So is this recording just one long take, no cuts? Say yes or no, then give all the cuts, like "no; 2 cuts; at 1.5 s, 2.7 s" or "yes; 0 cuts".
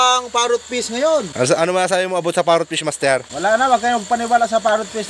no; 1 cut; at 3.3 s